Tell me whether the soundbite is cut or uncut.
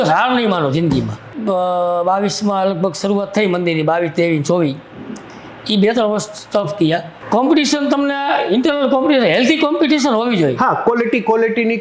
cut